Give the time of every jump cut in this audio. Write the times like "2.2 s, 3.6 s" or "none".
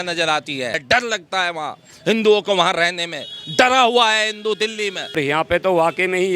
0.8 s, 5.2 s

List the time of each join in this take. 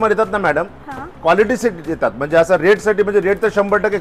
none

